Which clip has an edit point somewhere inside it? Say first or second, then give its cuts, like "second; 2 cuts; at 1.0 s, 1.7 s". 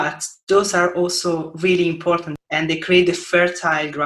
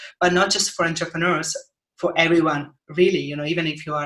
first; 1 cut; at 2.3 s